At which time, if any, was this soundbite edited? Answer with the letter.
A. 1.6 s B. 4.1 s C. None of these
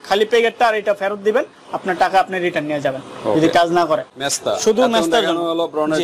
B